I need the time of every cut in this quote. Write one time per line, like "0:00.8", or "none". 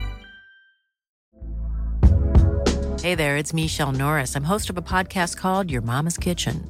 0:01.2